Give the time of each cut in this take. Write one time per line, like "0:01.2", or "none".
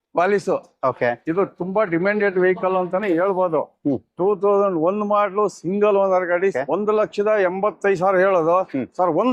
0:06.6